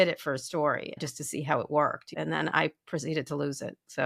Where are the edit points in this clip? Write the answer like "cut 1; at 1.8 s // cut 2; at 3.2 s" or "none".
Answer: cut 1; at 1.0 s // cut 2; at 2.1 s